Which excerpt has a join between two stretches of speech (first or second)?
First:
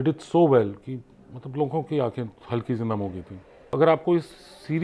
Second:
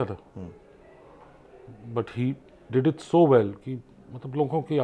first